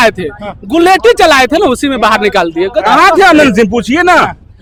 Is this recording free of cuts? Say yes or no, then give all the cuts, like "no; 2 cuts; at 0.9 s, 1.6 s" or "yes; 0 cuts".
yes; 0 cuts